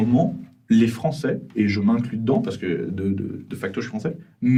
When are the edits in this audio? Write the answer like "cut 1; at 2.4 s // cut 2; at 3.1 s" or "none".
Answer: none

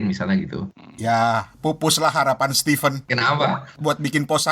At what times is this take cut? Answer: cut 1; at 3.3 s

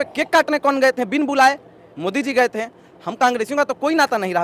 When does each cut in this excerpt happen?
none

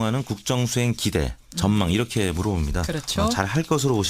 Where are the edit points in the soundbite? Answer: cut 1; at 1.8 s

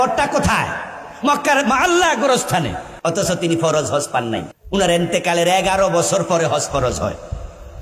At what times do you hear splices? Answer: cut 1; at 2.8 s // cut 2; at 4.5 s

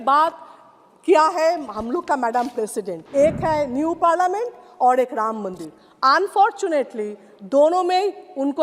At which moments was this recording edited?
cut 1; at 3.0 s

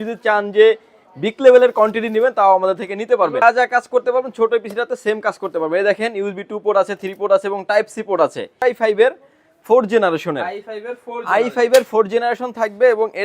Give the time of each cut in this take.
cut 1; at 3.4 s // cut 2; at 8.6 s

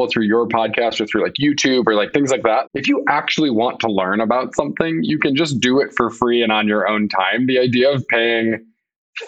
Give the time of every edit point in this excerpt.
cut 1; at 2.7 s

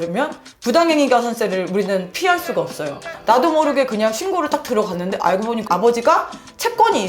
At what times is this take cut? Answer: cut 1; at 3.1 s

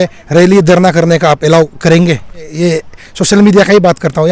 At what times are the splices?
cut 1; at 2.5 s

